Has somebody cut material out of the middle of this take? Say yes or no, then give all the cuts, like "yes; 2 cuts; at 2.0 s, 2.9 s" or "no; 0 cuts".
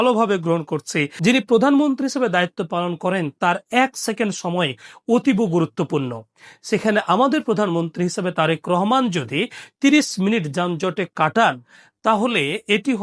yes; 1 cut; at 1.1 s